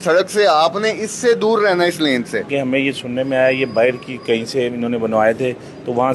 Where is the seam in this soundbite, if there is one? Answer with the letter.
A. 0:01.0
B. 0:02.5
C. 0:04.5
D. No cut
B